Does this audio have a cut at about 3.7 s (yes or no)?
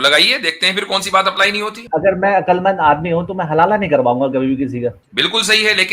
no